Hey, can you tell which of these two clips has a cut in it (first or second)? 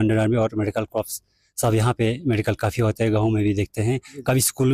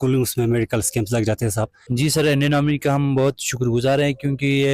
second